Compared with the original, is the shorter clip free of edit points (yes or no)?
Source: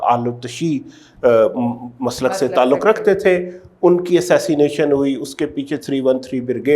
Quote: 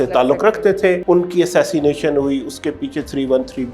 no